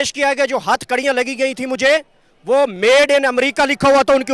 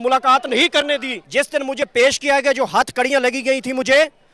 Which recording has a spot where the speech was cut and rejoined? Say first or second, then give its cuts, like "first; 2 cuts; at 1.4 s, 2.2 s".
second; 1 cut; at 1.2 s